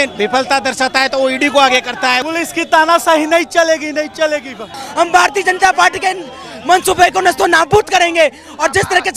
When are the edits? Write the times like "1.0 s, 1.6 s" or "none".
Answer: 2.2 s, 4.8 s